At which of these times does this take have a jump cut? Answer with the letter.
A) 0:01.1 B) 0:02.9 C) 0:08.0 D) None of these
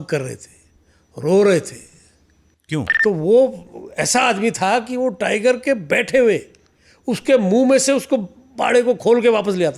B